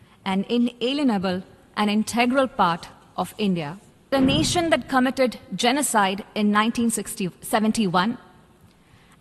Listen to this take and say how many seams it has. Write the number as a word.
one